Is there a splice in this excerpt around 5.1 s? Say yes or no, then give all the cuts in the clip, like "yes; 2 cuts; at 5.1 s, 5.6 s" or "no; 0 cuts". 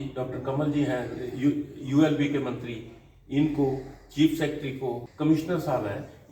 yes; 1 cut; at 5.1 s